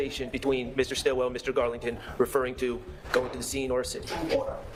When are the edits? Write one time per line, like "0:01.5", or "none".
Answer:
none